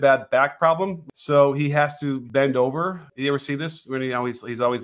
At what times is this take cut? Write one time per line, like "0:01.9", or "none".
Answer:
0:01.0
0:02.2
0:03.1

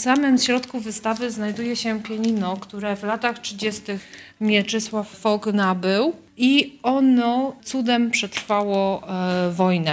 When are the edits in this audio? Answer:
0:05.2
0:06.3
0:07.6

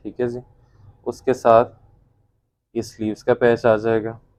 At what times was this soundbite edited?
none

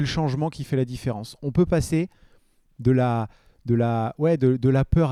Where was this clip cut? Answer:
none

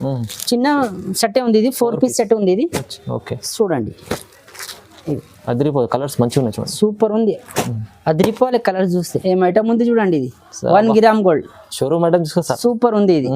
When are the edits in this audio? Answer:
0:09.1

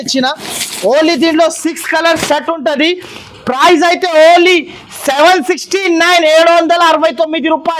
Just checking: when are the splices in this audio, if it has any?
none

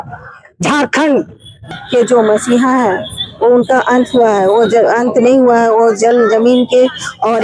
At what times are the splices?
0:01.6

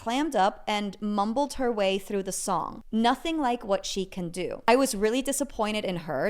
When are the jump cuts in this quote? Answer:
0:02.8
0:04.7

